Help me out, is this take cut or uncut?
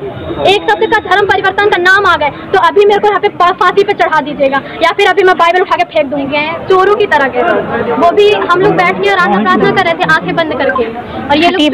cut